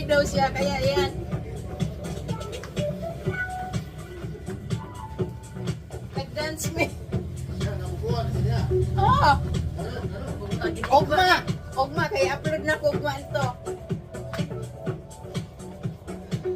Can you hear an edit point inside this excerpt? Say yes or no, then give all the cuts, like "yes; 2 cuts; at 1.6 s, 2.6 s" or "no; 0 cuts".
no; 0 cuts